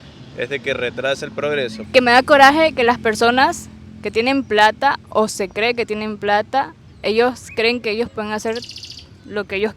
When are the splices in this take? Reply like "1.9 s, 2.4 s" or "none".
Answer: 1.8 s